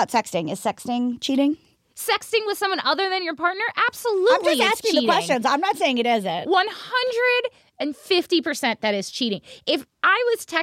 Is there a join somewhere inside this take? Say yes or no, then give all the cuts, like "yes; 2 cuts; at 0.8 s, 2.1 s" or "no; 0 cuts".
yes; 1 cut; at 1.7 s